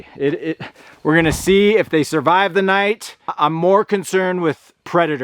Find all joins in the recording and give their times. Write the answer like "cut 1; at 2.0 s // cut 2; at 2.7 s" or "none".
cut 1; at 3.3 s